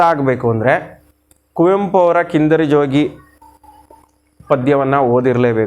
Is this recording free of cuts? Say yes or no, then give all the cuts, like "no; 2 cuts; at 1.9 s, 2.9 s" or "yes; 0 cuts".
yes; 0 cuts